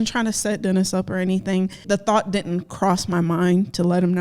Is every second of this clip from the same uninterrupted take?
no; 1 cut; at 1.8 s

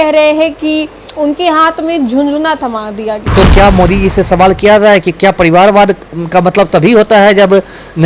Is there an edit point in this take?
yes; 1 cut; at 3.1 s

